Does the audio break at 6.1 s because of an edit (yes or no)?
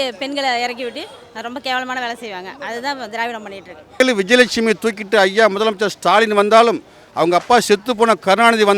no